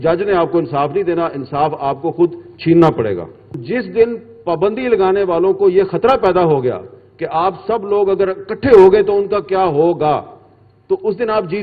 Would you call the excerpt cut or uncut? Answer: cut